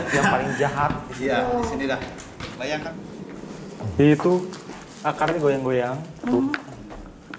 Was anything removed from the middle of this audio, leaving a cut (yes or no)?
yes